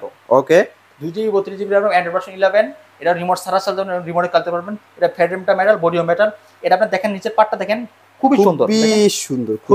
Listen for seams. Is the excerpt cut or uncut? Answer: uncut